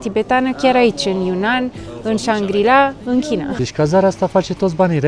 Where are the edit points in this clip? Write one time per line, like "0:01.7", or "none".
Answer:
0:03.6

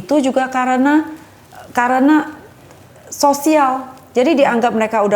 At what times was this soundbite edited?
none

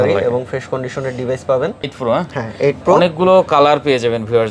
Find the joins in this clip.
0:02.0

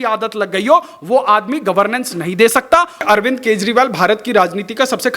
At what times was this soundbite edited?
0:03.0

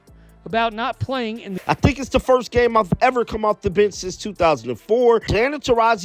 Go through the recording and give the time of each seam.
0:01.4

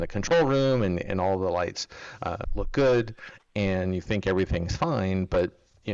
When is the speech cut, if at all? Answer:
none

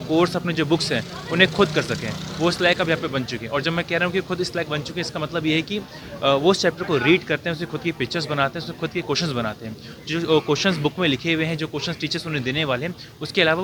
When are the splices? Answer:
none

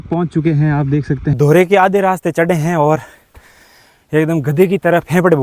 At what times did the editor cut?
0:01.3

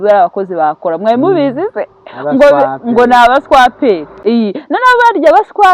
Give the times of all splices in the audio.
0:04.1

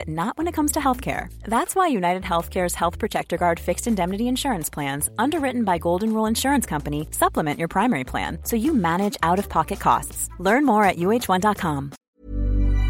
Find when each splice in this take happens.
0:11.9

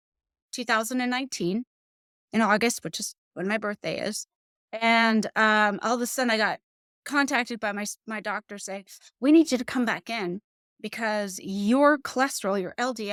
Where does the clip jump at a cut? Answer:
none

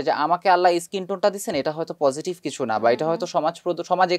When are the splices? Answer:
none

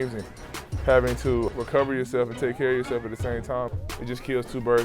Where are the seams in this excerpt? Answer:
0:01.5
0:03.7

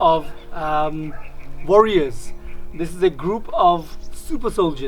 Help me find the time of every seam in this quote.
none

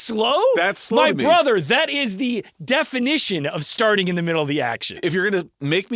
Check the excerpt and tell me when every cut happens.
0:05.0

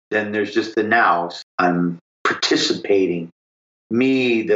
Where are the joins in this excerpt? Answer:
0:01.4

